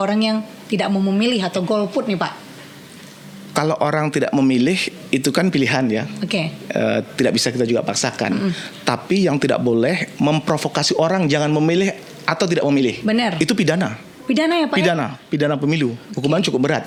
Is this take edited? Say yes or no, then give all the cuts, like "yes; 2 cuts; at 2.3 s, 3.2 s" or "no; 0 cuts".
no; 0 cuts